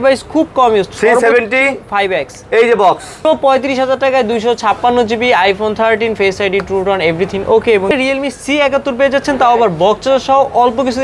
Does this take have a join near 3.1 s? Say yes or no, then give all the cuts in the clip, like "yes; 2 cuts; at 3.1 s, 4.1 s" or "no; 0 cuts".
yes; 2 cuts; at 3.1 s, 7.9 s